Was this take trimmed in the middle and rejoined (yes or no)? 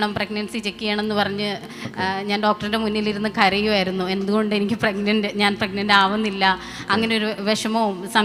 no